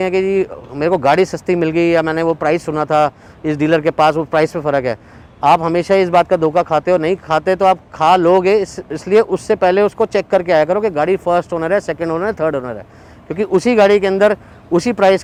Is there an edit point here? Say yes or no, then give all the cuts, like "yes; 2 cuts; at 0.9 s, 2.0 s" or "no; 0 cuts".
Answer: no; 0 cuts